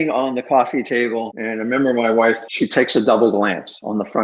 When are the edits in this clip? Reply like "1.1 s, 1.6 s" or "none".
1.4 s, 2.5 s